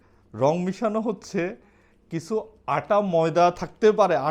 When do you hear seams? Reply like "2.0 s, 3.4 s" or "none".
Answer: none